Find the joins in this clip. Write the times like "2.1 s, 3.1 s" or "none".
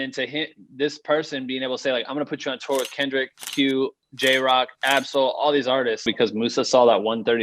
6.1 s